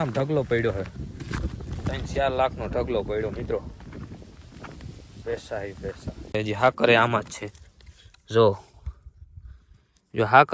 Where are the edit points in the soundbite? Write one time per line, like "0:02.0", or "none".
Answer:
0:06.3